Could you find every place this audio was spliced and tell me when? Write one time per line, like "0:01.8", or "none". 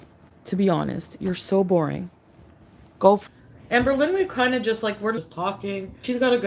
0:03.2
0:05.3